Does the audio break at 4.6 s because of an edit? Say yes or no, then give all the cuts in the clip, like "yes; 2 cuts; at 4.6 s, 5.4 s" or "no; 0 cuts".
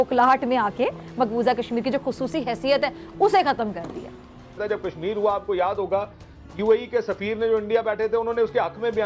yes; 1 cut; at 4.6 s